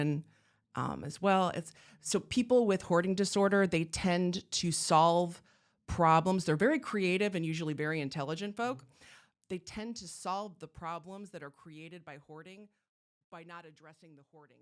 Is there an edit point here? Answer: no; 0 cuts

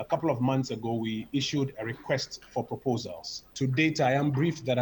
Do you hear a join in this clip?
no; 0 cuts

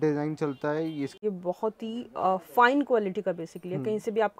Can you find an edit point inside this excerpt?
yes; 1 cut; at 1.1 s

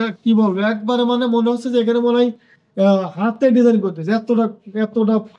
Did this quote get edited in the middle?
no; 0 cuts

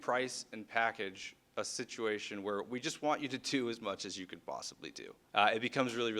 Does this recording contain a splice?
no; 0 cuts

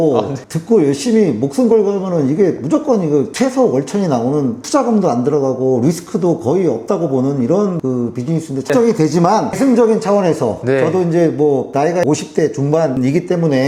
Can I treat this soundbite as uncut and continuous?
yes; 0 cuts

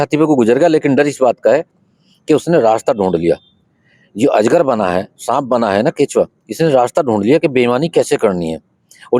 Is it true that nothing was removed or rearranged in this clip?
yes; 0 cuts

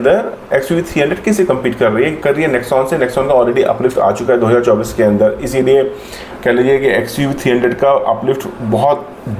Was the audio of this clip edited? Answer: no; 0 cuts

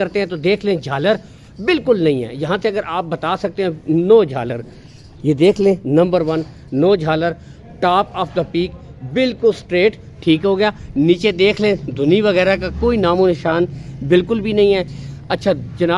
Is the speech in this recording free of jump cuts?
yes; 0 cuts

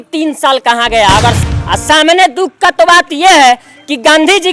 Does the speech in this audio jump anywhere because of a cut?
yes; 1 cut; at 1.4 s

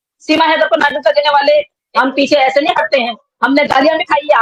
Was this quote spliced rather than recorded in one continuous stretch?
yes; 1 cut; at 1.8 s

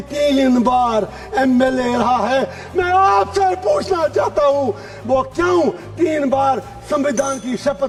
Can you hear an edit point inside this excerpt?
no; 0 cuts

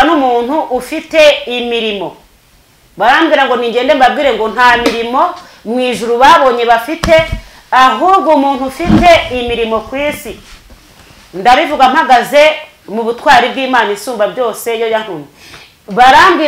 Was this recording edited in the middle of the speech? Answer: no; 0 cuts

